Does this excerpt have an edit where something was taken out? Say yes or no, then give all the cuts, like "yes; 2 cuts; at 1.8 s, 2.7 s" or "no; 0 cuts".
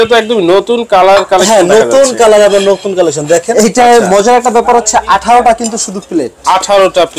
yes; 1 cut; at 3.5 s